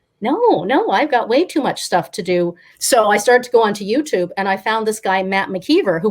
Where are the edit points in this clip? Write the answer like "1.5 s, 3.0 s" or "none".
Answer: 2.7 s